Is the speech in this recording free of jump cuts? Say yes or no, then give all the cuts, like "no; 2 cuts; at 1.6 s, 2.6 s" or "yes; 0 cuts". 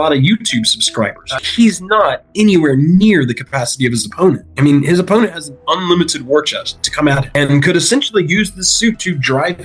no; 1 cut; at 1.3 s